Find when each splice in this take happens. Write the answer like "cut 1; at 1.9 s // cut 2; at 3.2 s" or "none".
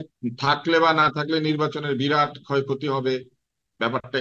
none

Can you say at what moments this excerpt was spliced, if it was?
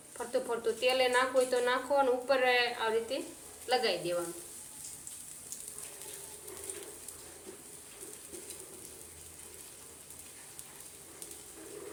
none

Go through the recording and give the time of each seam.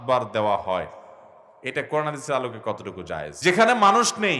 cut 1; at 3.3 s

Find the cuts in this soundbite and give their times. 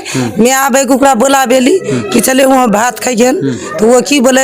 none

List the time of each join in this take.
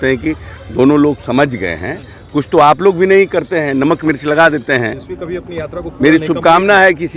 cut 1; at 5.1 s

